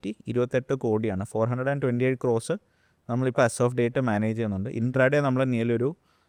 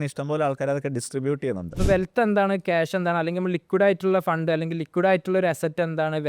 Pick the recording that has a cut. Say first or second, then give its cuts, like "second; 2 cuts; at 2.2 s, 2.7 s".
second; 1 cut; at 1.8 s